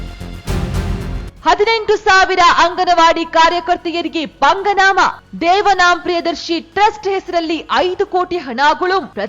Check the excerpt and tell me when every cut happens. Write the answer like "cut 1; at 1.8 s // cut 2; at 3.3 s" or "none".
cut 1; at 0.9 s